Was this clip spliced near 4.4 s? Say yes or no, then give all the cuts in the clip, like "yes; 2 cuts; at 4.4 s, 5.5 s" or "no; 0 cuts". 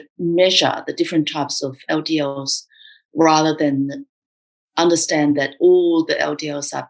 no; 0 cuts